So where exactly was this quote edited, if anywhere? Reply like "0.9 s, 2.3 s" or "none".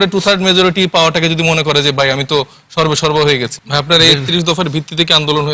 3.5 s